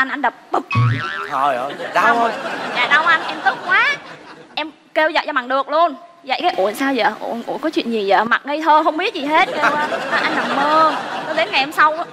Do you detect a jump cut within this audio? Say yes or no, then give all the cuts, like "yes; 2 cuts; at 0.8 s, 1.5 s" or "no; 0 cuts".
no; 0 cuts